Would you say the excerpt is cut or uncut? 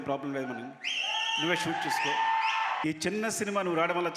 cut